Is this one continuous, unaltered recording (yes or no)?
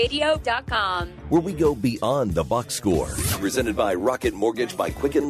no